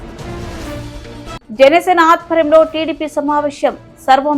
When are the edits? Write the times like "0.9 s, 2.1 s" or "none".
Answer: 1.4 s